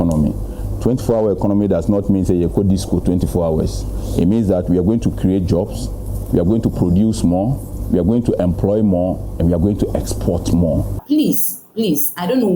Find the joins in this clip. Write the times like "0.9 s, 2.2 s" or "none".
11.0 s